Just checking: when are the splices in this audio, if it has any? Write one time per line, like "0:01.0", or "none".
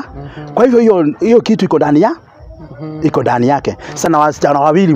0:04.1